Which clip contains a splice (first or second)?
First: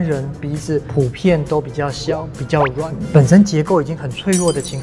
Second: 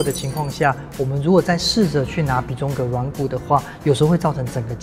first